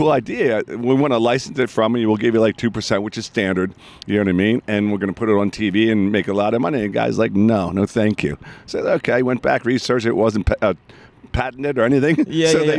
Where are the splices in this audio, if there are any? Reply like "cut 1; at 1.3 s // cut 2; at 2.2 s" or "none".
none

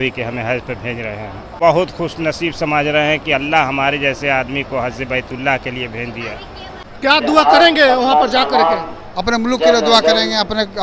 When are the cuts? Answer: cut 1; at 1.5 s // cut 2; at 6.8 s

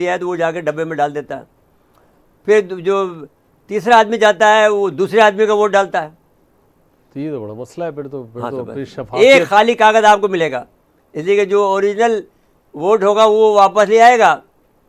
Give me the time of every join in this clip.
none

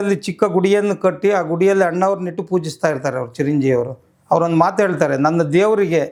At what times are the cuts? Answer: none

